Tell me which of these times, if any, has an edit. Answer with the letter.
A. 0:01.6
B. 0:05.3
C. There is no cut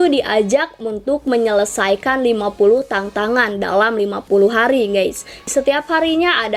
C